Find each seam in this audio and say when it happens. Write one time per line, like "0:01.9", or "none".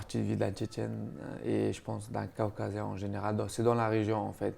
none

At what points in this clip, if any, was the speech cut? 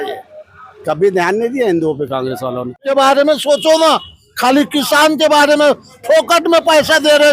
0:02.8

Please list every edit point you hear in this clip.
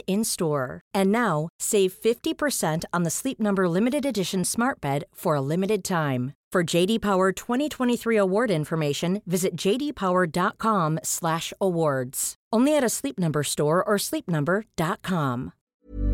none

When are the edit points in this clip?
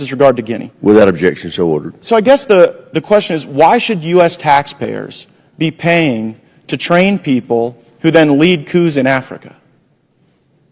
none

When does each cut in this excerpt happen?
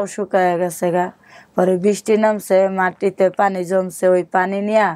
none

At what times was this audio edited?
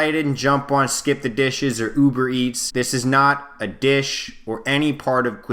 0:02.6

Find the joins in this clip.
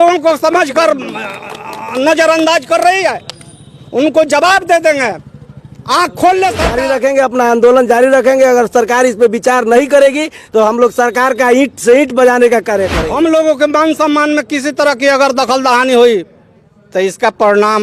0:06.7
0:13.0

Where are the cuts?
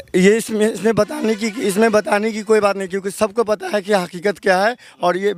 none

